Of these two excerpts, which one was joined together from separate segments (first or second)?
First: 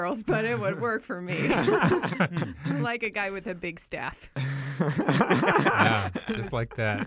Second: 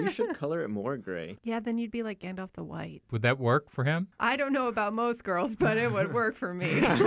second